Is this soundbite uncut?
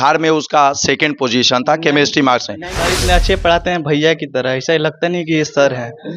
no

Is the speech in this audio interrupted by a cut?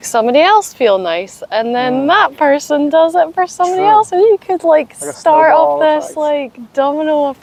no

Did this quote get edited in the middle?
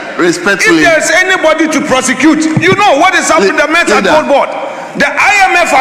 no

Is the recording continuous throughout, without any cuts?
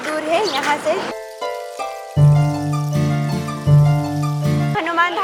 yes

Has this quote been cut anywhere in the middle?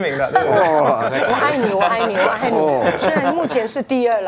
no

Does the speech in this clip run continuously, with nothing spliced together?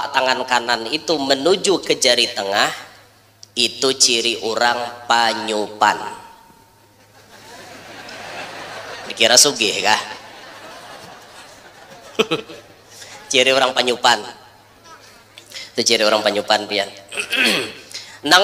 yes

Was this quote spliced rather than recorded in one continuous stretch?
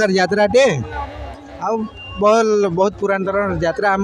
no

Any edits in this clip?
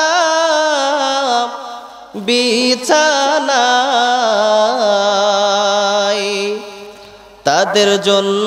no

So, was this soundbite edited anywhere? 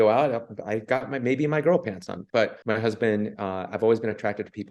yes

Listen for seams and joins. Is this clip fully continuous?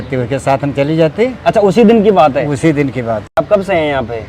no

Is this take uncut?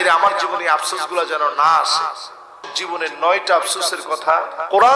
no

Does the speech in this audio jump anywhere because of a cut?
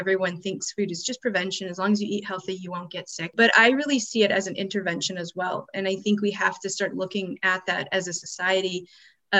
yes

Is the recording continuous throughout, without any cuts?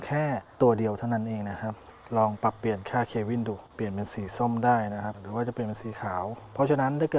no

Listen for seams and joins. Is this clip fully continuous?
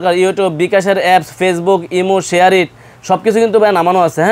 yes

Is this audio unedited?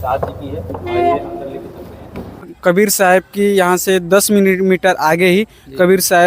no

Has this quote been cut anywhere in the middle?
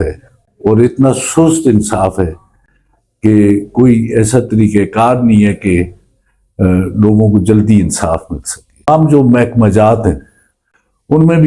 yes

